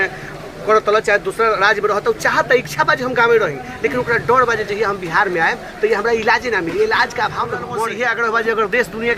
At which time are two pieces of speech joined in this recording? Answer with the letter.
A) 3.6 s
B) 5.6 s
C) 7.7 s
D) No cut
C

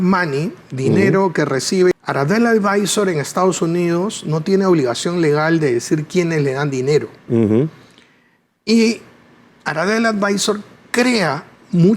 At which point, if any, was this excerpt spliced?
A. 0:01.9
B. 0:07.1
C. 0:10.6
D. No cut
A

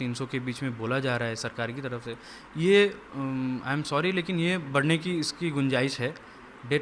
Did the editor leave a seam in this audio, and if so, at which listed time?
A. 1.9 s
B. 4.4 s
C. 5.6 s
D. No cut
D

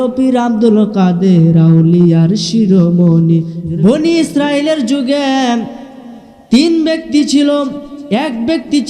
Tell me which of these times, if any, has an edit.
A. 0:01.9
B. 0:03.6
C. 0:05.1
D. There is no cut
B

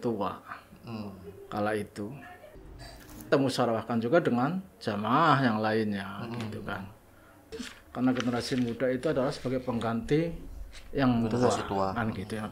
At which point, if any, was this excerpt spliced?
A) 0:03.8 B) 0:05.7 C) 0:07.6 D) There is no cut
C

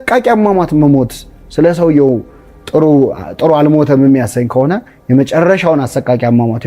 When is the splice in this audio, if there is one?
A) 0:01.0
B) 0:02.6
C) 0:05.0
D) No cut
D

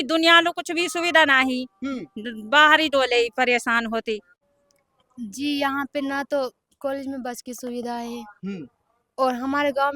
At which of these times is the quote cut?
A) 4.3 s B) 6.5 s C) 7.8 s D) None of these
A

